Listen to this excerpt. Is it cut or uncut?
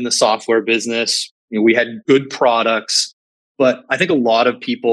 cut